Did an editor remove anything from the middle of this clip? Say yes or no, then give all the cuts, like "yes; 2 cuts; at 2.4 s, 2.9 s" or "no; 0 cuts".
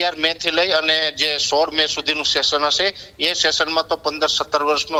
no; 0 cuts